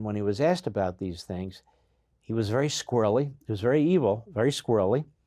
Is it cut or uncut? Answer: uncut